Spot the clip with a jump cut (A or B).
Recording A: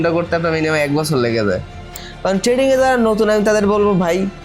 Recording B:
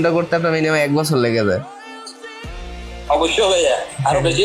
A